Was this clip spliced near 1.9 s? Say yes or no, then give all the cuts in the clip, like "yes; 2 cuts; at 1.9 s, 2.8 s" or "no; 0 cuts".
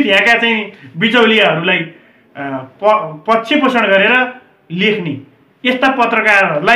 no; 0 cuts